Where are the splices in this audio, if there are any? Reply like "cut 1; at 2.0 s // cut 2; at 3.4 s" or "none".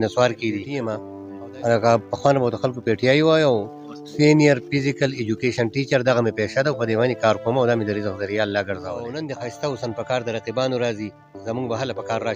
cut 1; at 0.9 s // cut 2; at 9.1 s